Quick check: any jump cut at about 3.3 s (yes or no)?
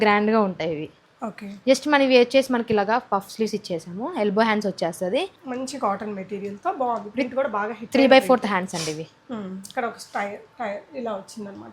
no